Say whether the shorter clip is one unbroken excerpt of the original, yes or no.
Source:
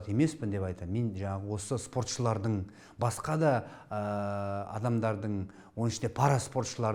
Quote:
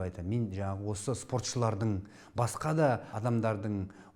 no